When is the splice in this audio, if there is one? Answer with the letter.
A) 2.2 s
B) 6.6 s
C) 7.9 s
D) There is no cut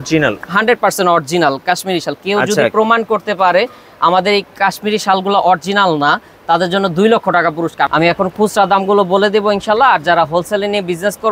C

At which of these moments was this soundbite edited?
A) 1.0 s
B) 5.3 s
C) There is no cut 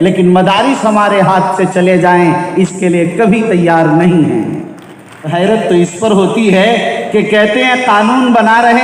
B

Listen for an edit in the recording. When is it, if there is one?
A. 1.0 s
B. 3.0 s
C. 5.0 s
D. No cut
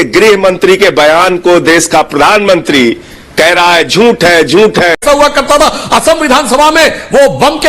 C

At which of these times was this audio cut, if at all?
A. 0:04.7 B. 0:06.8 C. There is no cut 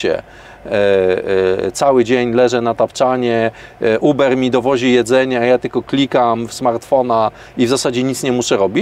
C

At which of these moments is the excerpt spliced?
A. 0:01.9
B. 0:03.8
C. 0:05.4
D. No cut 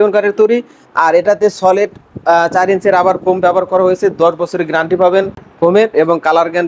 D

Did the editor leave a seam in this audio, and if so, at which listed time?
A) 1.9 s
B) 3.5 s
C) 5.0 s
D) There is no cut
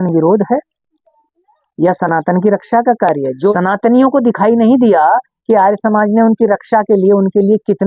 B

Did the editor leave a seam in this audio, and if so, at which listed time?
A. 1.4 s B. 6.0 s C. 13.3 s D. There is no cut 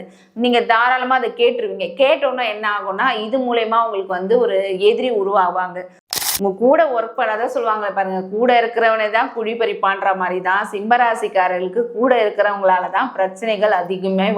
B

